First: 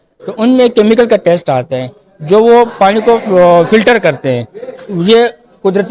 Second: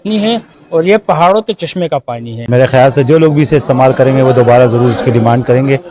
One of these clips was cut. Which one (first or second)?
second